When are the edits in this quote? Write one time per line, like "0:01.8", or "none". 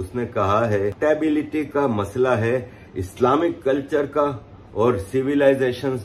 0:01.0